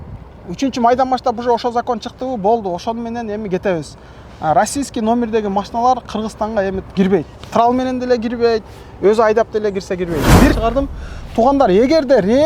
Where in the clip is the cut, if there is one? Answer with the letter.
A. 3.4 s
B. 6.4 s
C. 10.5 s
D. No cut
C